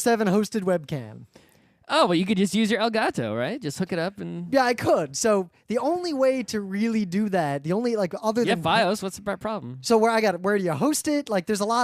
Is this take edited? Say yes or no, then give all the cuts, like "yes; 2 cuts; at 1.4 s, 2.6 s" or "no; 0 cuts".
yes; 1 cut; at 8.2 s